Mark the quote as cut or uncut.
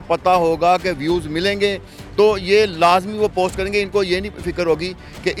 uncut